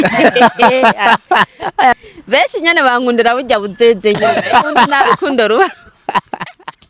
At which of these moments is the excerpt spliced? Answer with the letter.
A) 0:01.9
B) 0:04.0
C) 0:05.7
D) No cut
A